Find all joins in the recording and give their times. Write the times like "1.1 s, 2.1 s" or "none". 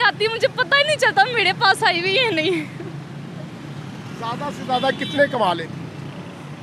none